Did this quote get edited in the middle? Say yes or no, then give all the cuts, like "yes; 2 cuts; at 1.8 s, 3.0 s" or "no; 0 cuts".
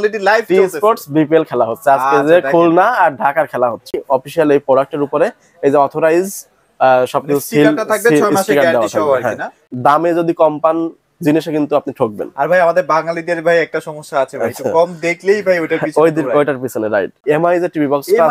yes; 3 cuts; at 4.0 s, 9.7 s, 17.2 s